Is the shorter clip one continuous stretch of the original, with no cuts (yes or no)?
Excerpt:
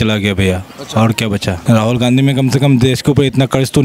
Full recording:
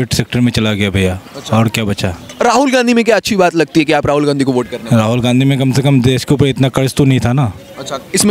no